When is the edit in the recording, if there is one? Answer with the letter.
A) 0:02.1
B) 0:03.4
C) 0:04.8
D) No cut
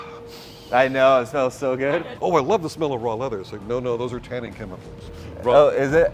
A